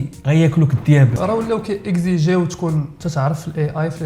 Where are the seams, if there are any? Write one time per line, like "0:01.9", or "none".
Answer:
0:01.1